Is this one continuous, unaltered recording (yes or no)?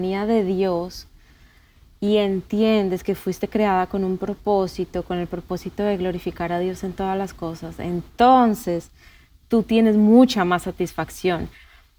yes